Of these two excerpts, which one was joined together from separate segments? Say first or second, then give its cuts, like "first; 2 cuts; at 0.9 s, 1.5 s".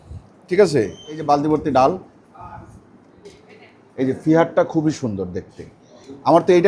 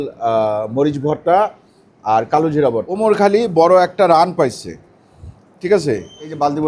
second; 1 cut; at 3.0 s